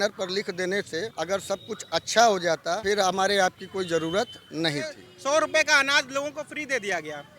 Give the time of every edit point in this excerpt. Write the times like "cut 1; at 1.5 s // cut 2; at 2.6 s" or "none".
cut 1; at 1.1 s // cut 2; at 2.8 s // cut 3; at 5.1 s